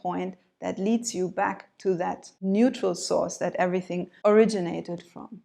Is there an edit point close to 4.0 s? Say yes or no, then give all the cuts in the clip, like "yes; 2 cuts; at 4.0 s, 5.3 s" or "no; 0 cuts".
yes; 2 cuts; at 2.3 s, 4.0 s